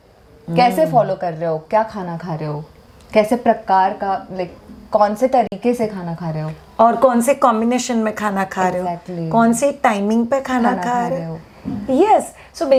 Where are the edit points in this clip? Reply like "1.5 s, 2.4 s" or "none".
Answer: none